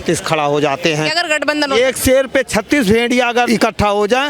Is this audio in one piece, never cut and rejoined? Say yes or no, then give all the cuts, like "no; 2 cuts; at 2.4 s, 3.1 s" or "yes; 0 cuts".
no; 2 cuts; at 1.1 s, 3.5 s